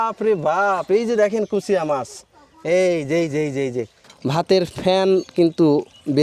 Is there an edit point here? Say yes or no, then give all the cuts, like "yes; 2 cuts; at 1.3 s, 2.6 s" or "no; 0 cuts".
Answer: yes; 1 cut; at 4.0 s